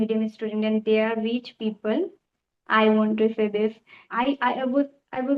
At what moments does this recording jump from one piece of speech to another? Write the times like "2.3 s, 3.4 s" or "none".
4.0 s